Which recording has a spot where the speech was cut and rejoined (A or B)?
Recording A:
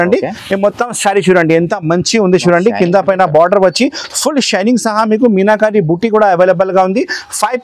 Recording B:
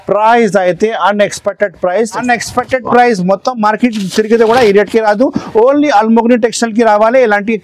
B